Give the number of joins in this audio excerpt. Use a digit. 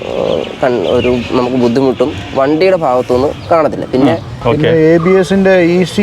1